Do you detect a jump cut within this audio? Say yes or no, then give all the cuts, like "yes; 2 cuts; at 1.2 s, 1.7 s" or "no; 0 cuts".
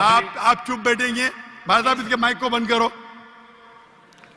no; 0 cuts